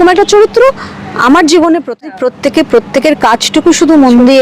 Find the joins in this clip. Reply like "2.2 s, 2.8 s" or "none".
2.1 s